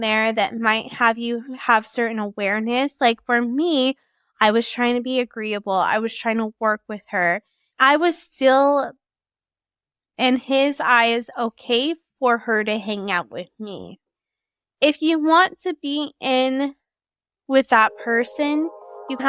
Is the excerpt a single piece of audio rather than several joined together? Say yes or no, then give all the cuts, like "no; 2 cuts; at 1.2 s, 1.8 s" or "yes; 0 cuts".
no; 2 cuts; at 7.5 s, 14.1 s